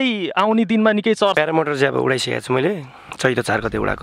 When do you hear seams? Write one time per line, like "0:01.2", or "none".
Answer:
0:01.4